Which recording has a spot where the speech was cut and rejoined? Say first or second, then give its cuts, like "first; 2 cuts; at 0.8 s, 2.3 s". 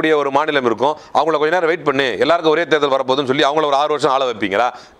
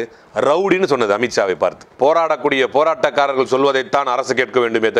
second; 1 cut; at 1.9 s